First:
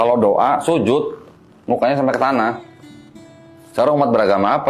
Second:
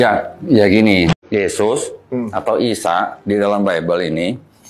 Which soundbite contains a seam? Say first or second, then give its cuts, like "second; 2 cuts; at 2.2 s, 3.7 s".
second; 1 cut; at 1.1 s